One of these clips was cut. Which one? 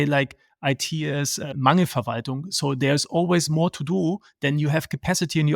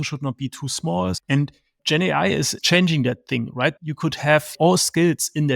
second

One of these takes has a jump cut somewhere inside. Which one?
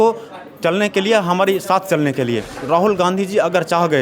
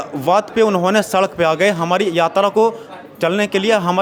first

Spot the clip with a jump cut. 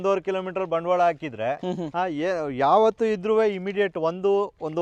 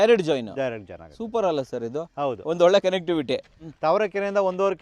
second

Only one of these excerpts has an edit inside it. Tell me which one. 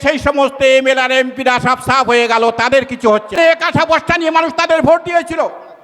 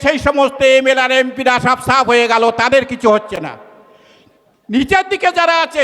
first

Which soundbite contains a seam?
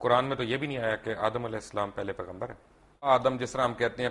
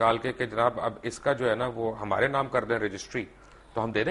first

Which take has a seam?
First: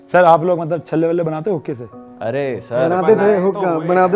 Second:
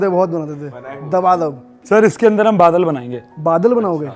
second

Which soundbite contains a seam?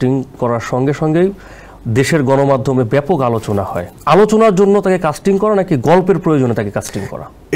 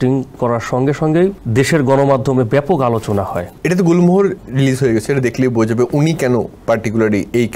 second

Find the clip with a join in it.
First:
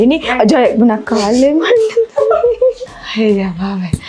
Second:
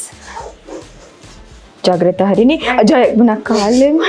first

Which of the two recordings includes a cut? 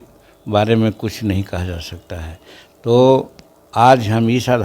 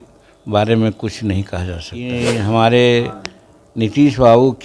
second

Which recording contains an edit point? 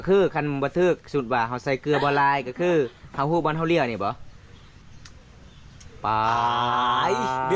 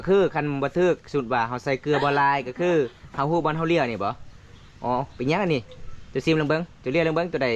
first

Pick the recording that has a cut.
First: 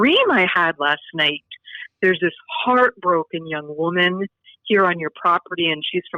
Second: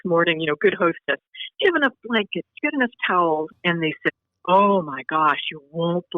second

